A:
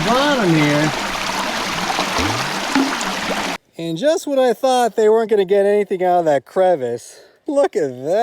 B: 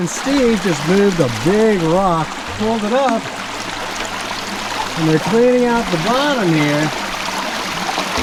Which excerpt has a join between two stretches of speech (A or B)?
A